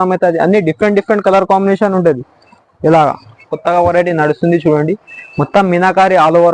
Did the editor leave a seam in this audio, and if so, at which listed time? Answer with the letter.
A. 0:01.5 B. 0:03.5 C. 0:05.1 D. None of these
B